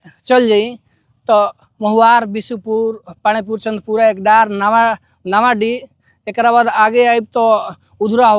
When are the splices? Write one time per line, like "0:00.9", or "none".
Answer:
none